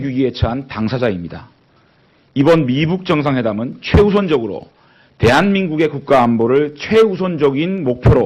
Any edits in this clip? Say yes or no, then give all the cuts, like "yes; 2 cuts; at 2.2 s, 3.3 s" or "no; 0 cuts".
no; 0 cuts